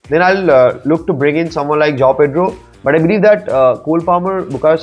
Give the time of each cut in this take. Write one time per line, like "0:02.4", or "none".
0:02.7